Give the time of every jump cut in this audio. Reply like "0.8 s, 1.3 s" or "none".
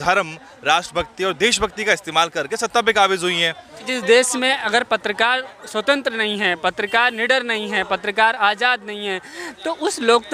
3.8 s